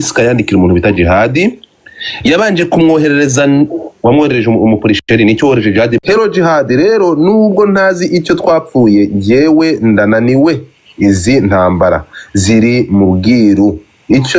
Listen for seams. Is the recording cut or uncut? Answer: cut